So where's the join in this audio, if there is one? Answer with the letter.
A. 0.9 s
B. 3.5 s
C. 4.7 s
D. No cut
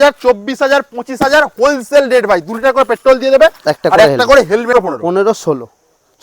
C